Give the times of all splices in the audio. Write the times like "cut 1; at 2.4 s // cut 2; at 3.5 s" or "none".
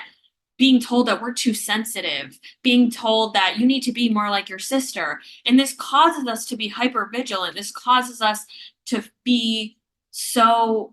none

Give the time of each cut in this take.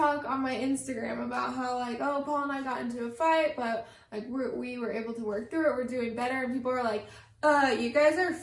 none

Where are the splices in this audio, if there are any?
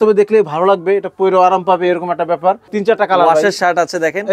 cut 1; at 2.7 s

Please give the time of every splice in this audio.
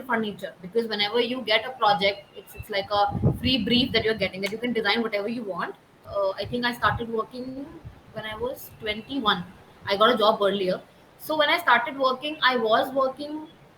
cut 1; at 5.9 s

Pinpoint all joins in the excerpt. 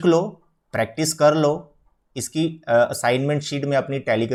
none

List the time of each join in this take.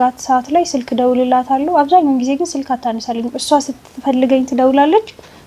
none

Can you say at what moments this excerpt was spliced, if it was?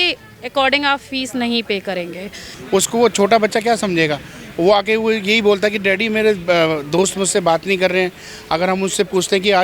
cut 1; at 2.5 s

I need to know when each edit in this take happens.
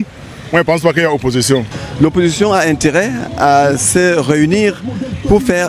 cut 1; at 1.8 s

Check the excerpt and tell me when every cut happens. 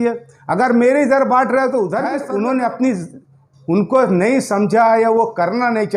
cut 1; at 2.2 s

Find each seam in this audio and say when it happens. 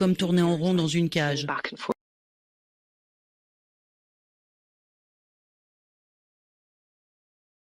none

